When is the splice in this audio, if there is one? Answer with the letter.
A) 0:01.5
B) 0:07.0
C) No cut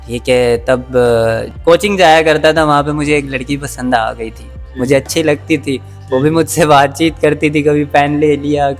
A